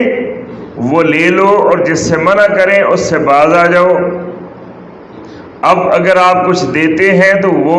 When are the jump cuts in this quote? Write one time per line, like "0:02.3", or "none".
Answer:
none